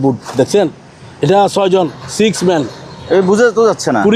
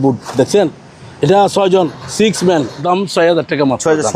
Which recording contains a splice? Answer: second; 1 cut; at 2.8 s

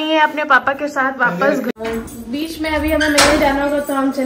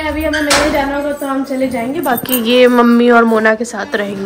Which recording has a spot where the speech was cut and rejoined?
first; 1 cut; at 1.7 s

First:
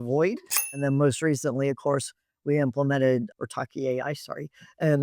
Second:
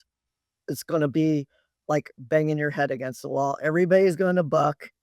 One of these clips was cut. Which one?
first; 2 cuts; at 0.8 s, 3.3 s

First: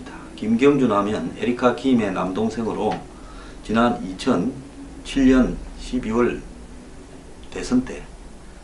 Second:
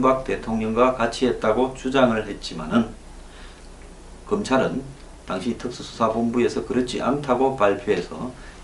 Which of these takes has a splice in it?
second; 1 cut; at 7.5 s

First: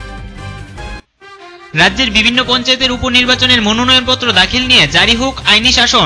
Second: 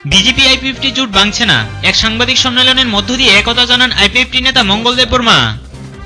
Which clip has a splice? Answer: first; 1 cut; at 0.9 s

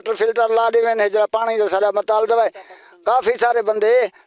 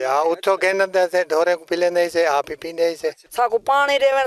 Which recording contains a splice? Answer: second; 1 cut; at 3.2 s

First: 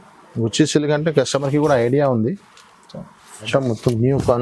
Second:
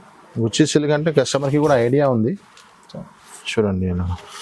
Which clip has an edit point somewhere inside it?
first; 1 cut; at 3.5 s

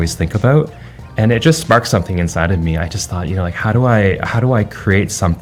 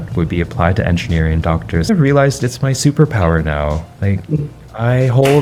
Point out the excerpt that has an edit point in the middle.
second; 1 cut; at 1.8 s

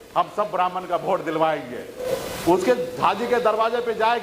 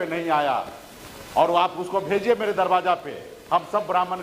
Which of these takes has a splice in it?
first; 1 cut; at 2.0 s

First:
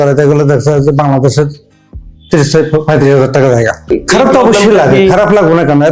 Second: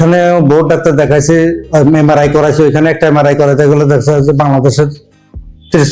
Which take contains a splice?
first; 1 cut; at 3.9 s

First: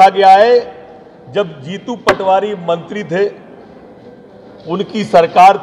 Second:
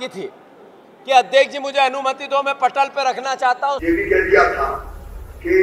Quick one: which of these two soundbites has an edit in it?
second; 1 cut; at 3.8 s

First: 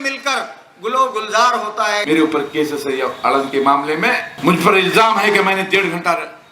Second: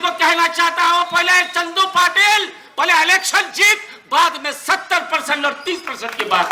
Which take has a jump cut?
first; 2 cuts; at 2.0 s, 4.3 s

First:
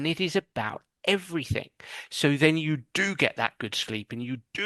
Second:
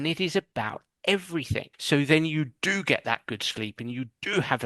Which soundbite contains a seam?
second; 1 cut; at 1.7 s

